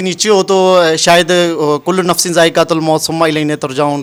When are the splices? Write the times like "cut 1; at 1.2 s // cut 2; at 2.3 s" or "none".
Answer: none